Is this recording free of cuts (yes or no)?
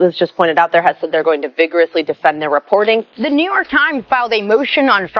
no